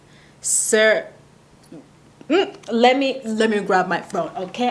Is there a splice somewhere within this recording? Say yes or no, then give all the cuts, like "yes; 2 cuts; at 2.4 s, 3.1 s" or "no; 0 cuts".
no; 0 cuts